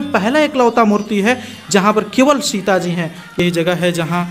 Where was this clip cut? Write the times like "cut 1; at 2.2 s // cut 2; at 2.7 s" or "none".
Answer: cut 1; at 3.4 s